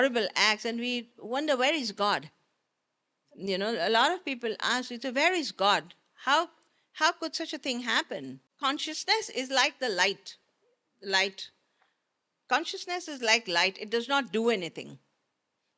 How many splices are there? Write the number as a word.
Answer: one